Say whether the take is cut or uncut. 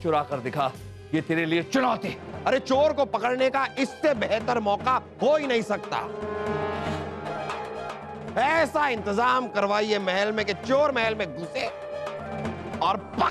cut